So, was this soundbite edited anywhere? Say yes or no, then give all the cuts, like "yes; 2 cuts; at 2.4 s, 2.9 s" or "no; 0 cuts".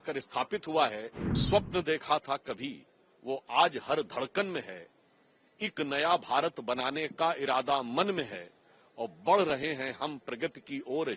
yes; 1 cut; at 1.3 s